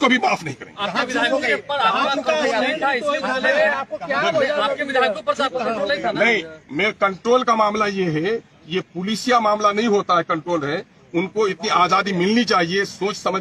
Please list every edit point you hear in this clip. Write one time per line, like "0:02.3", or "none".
none